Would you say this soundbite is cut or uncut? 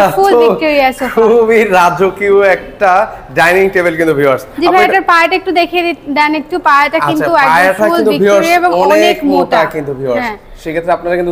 uncut